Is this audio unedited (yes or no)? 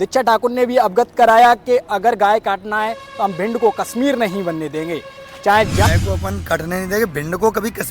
no